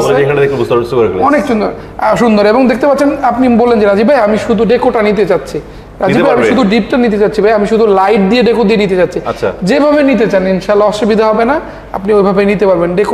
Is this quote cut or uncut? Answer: uncut